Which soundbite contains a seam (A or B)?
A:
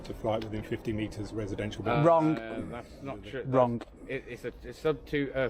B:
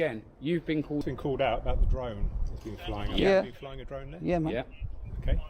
B